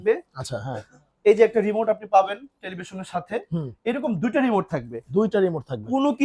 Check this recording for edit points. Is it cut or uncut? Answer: uncut